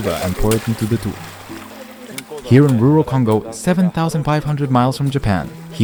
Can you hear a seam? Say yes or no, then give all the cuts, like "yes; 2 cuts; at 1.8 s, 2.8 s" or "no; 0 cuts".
no; 0 cuts